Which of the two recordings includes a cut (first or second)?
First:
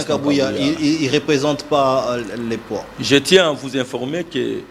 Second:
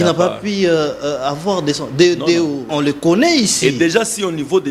second